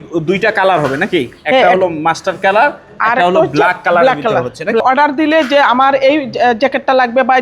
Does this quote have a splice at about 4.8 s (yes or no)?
yes